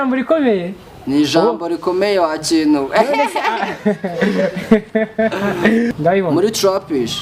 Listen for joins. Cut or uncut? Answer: cut